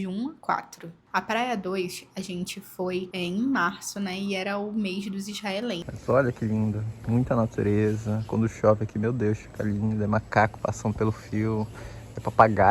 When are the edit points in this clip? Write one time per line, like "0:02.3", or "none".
0:01.0
0:05.9